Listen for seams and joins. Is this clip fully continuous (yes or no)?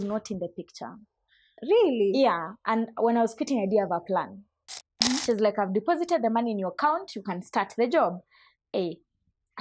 no